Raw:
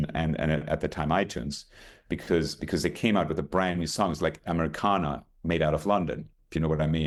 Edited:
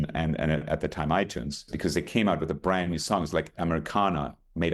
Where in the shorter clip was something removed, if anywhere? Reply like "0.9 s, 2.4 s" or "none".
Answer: 1.7 s